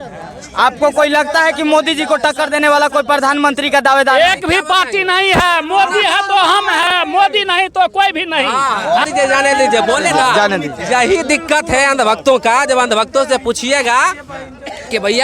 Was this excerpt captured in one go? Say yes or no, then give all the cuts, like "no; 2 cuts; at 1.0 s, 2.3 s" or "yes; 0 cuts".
no; 1 cut; at 9.0 s